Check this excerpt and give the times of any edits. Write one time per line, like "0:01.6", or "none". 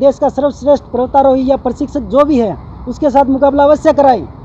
none

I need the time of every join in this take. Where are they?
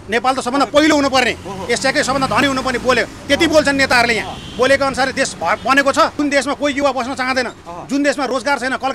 0:06.1

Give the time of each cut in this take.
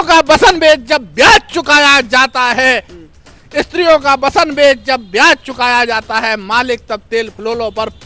none

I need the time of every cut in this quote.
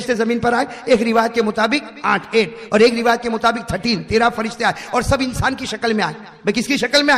none

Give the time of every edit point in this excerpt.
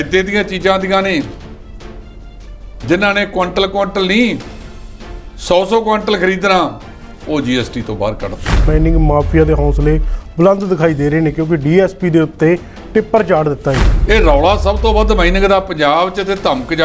0:08.7
0:13.9

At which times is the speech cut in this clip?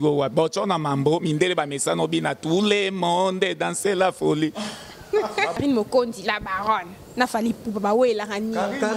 0:05.6

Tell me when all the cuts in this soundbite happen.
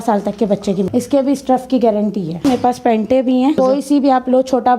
0:00.9
0:02.4
0:03.6

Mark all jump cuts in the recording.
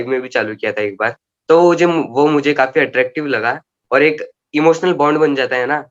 none

